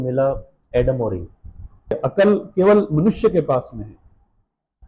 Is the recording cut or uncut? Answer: cut